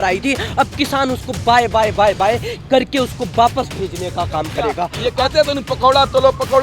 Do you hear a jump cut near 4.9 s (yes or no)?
yes